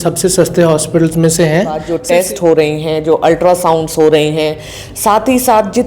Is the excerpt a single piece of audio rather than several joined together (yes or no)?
no